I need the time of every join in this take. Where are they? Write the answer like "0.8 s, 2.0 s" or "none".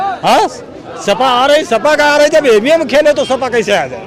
none

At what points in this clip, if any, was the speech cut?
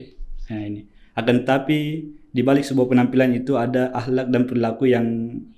none

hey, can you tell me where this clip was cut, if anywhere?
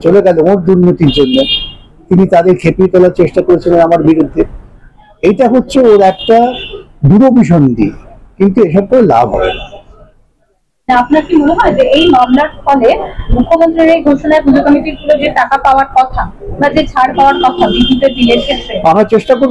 none

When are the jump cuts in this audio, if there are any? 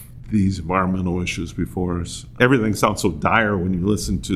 2.4 s

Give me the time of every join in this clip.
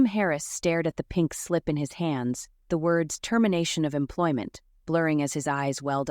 2.5 s

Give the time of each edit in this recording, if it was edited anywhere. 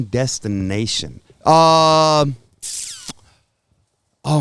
none

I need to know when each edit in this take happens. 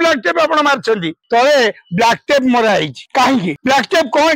1.2 s, 3.2 s

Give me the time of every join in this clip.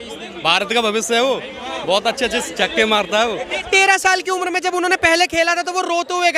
none

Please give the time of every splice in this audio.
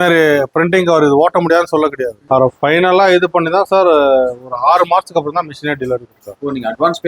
2.2 s

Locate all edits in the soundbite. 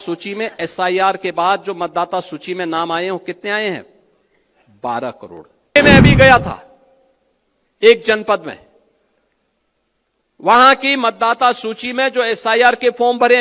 5.8 s

